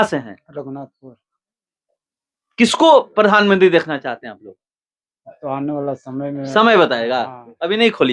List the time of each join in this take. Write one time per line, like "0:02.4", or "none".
none

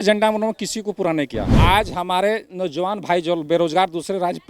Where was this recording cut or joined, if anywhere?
0:01.5

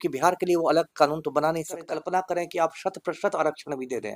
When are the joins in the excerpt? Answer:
0:01.8

